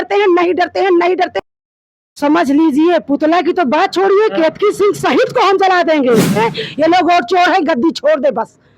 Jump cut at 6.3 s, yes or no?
yes